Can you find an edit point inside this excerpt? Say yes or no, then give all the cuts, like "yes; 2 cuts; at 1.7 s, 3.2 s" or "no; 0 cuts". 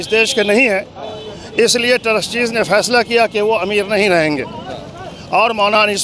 no; 0 cuts